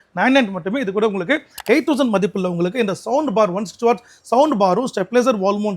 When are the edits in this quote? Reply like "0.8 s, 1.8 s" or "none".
none